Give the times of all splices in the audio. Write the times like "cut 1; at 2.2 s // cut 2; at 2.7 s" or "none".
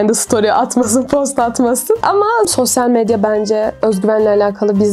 cut 1; at 2.5 s